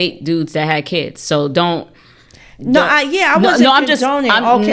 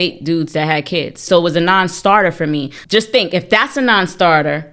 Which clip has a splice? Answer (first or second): second